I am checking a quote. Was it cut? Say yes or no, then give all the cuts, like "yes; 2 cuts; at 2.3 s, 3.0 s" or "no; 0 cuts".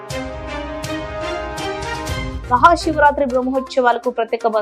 yes; 1 cut; at 2.3 s